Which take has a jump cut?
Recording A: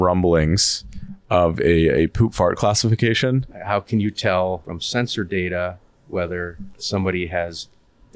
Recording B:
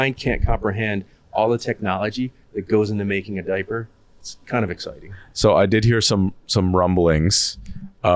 A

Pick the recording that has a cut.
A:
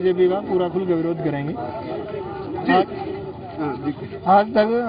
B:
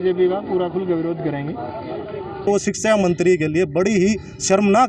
B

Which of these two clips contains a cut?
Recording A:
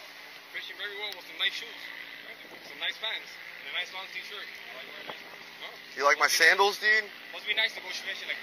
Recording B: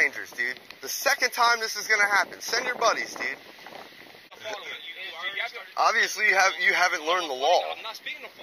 B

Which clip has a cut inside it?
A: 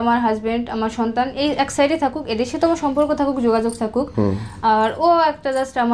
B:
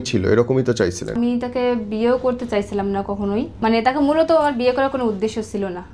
B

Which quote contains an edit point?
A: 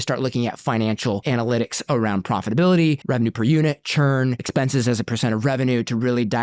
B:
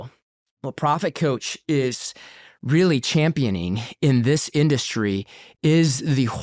A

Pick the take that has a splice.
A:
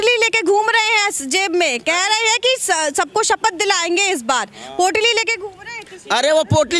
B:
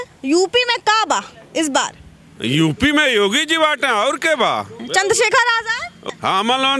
B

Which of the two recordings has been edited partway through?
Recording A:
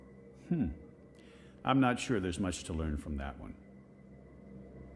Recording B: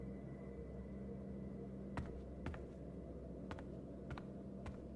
A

